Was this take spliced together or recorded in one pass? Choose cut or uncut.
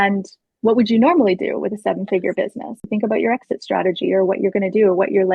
cut